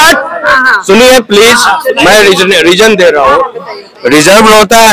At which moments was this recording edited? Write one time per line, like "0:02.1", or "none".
none